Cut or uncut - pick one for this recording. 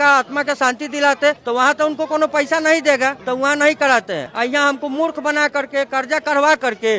uncut